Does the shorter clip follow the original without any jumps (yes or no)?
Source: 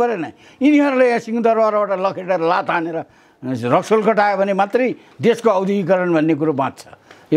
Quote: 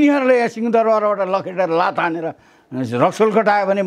yes